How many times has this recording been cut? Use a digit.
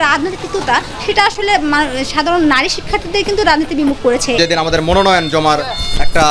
1